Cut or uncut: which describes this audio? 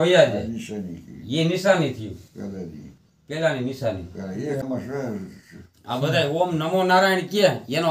cut